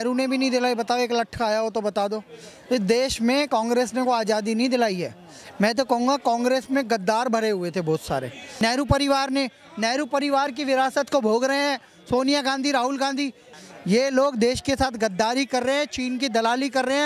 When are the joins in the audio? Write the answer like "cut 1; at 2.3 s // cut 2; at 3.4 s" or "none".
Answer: cut 1; at 8.4 s // cut 2; at 13.5 s